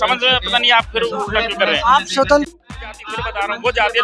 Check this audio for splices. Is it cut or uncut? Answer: cut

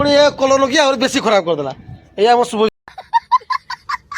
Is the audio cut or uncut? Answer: cut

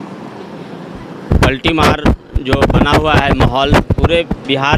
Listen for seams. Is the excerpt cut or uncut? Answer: uncut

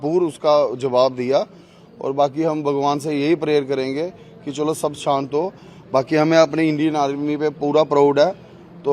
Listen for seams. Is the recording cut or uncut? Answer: uncut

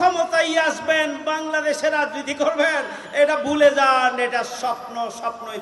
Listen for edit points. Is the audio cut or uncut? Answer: uncut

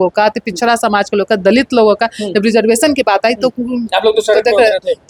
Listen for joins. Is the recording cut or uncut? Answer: uncut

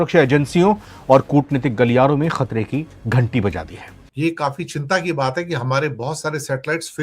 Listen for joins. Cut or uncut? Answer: cut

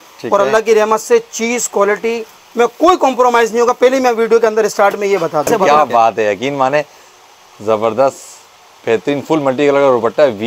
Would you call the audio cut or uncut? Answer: cut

